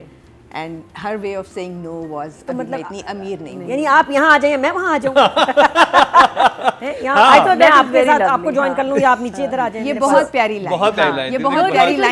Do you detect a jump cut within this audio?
no; 0 cuts

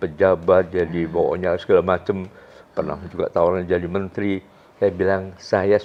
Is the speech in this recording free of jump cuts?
yes; 0 cuts

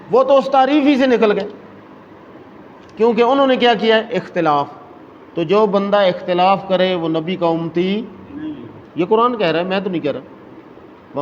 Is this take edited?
no; 0 cuts

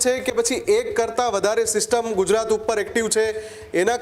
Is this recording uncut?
yes; 0 cuts

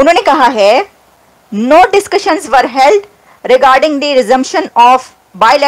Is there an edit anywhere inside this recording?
no; 0 cuts

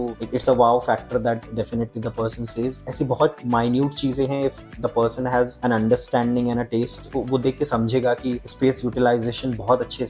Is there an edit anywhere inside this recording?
no; 0 cuts

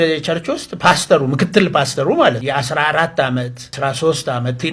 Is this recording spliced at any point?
yes; 2 cuts; at 2.4 s, 3.7 s

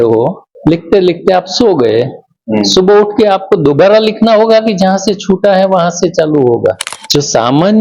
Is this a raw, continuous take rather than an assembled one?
no; 1 cut; at 6.9 s

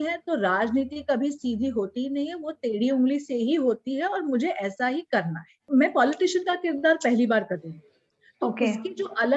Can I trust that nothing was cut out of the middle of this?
no; 1 cut; at 5.7 s

